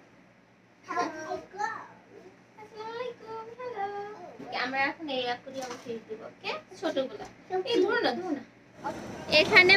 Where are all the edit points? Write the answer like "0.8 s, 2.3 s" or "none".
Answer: 4.5 s, 8.7 s